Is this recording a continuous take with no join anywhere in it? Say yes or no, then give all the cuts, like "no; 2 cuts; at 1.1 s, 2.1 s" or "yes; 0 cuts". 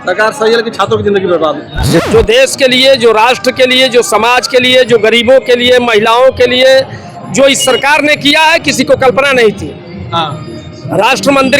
no; 1 cut; at 2.0 s